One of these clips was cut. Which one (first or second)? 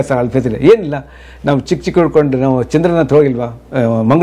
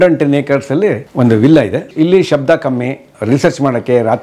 second